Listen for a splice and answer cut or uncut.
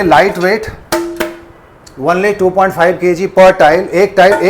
uncut